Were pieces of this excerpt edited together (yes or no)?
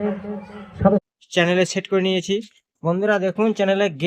yes